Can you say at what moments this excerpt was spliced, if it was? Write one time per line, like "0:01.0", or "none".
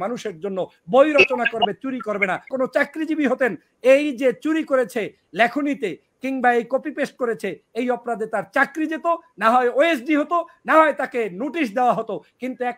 0:02.5